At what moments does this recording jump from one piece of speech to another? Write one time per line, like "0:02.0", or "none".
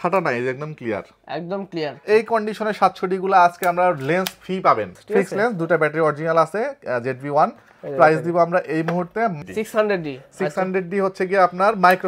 0:02.0
0:05.0
0:09.3